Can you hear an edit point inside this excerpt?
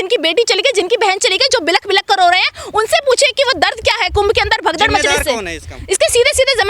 no; 0 cuts

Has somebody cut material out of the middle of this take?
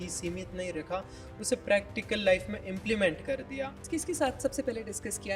yes; 1 cut; at 3.9 s

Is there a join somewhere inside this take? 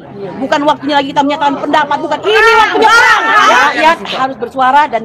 yes; 1 cut; at 3.6 s

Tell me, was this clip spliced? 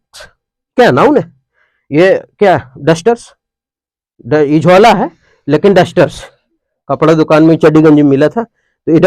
no; 0 cuts

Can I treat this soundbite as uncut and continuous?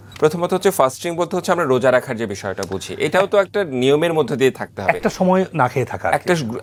yes; 0 cuts

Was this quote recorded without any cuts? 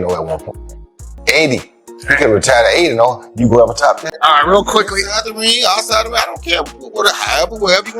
no; 1 cut; at 4.0 s

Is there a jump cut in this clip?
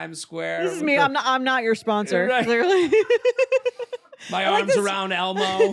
no; 0 cuts

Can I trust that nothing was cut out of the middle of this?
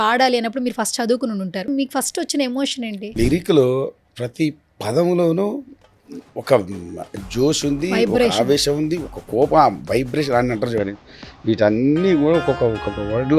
no; 2 cuts; at 1.7 s, 3.1 s

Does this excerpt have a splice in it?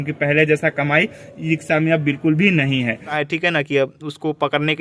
yes; 1 cut; at 3.2 s

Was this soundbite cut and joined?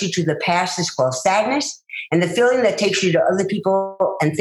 no; 0 cuts

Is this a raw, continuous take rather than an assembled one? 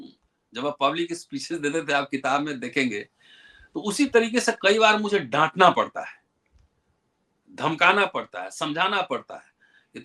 yes; 0 cuts

